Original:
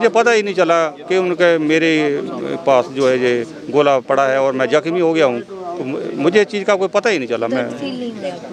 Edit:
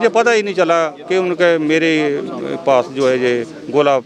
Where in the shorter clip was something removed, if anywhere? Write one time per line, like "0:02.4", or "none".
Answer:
none